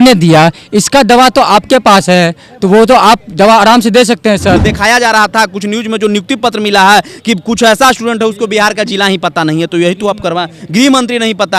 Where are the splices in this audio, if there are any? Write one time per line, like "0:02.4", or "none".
0:04.6